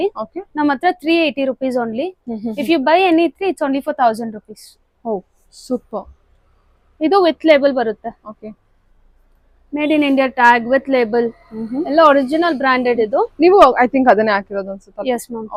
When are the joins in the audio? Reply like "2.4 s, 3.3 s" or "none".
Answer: none